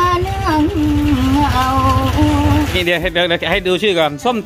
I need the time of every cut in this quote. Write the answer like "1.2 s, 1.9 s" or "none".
2.8 s